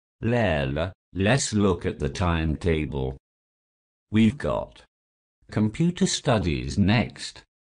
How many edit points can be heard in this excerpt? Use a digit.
1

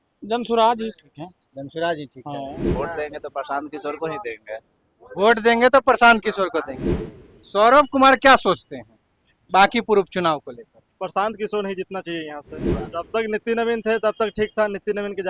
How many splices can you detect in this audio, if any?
3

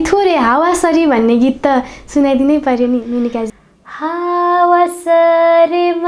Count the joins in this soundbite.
1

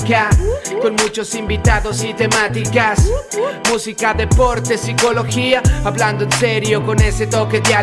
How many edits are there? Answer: 0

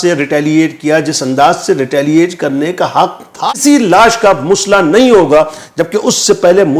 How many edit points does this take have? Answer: 1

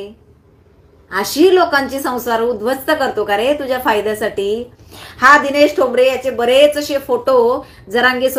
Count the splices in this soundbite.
0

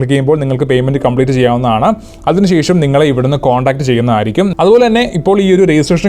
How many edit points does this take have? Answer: 1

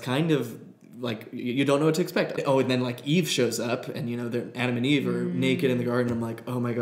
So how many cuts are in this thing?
1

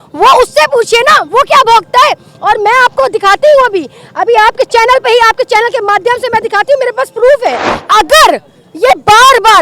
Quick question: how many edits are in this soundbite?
1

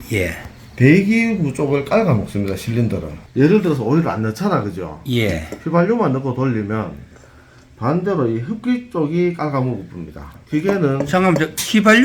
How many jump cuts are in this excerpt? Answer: 1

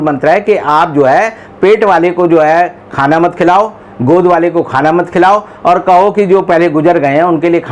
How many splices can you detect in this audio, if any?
0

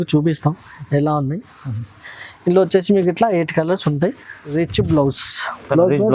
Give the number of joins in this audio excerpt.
1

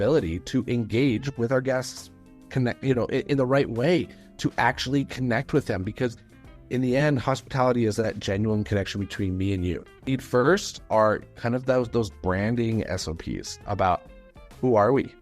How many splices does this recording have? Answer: 1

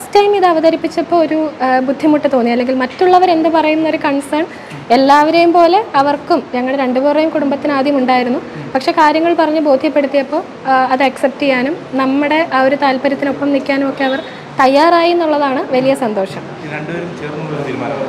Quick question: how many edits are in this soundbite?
0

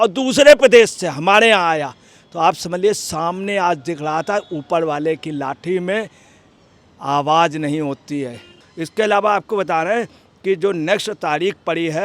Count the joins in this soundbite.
1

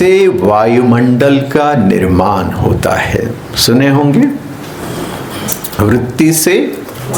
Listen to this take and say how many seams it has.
0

